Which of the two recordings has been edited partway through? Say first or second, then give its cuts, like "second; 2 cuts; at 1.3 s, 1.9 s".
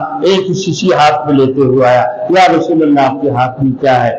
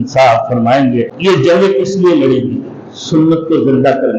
second; 1 cut; at 1.1 s